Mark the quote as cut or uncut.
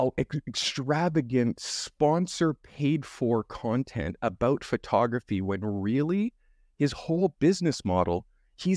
uncut